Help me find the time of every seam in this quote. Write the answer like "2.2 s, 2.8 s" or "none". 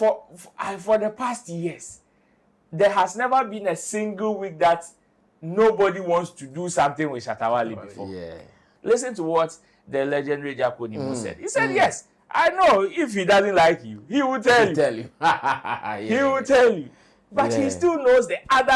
8.7 s